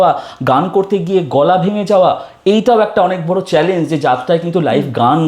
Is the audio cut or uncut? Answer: uncut